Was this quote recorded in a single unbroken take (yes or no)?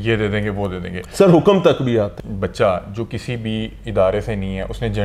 no